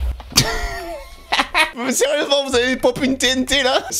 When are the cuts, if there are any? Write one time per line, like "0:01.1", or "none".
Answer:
0:01.7